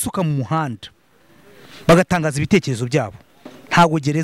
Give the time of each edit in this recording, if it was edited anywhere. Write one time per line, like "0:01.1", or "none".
none